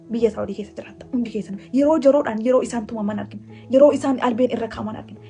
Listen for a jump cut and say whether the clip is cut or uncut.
uncut